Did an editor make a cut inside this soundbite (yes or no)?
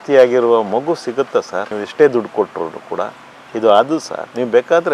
no